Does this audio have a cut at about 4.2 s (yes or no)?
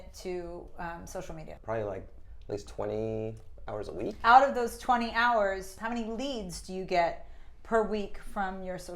yes